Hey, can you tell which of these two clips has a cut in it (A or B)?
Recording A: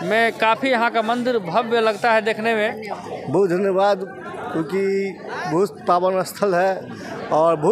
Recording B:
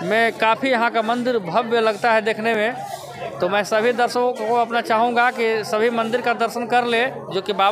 A